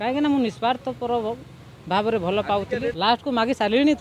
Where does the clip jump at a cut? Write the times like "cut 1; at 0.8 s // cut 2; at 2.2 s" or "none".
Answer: cut 1; at 2.9 s